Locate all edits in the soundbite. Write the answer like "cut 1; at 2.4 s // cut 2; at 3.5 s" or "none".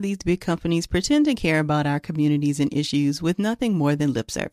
none